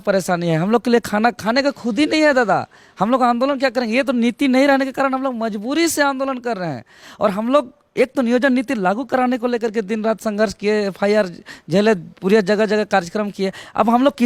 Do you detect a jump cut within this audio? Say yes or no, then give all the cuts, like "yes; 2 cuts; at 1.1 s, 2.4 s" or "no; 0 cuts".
no; 0 cuts